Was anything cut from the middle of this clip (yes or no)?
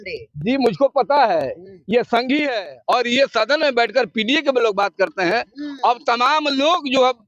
yes